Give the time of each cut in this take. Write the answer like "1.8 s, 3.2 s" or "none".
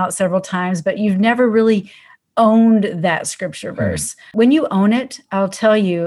4.3 s